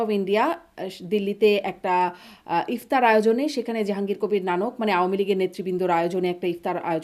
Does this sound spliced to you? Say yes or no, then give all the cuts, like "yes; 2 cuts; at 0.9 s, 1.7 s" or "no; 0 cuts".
no; 0 cuts